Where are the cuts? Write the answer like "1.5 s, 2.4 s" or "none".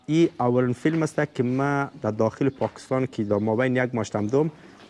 none